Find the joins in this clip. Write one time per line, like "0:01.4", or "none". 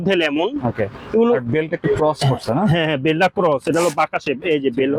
none

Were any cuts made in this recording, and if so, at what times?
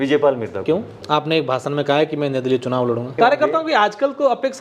0:01.0
0:03.2

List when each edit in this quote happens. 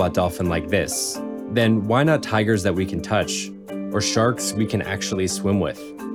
none

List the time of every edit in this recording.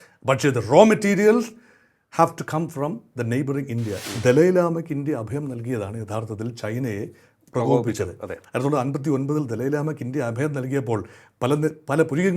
0:04.0

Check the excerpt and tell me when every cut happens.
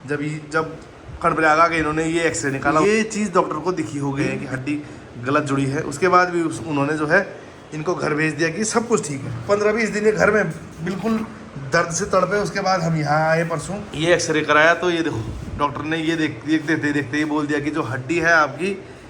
0:02.8
0:04.4
0:09.3
0:13.8

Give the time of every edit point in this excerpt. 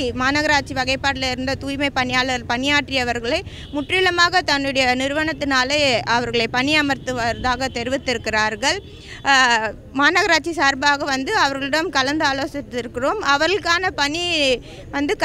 none

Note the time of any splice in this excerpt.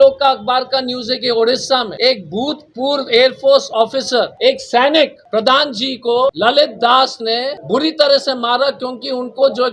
none

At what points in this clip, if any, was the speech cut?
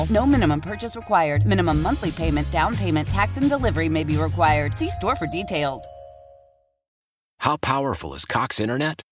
0:07.0

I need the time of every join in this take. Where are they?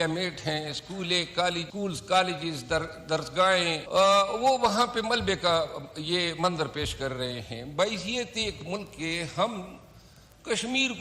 0:01.7
0:03.8

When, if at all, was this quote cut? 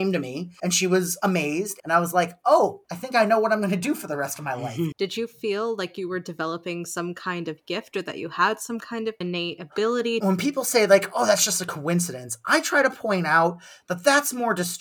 0:01.7
0:04.9
0:09.2
0:10.2

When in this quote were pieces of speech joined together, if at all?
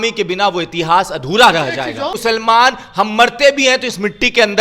0:02.2

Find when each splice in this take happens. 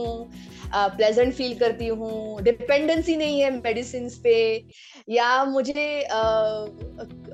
none

